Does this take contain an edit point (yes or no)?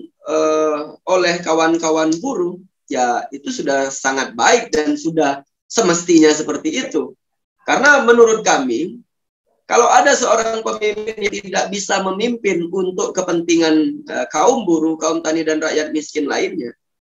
no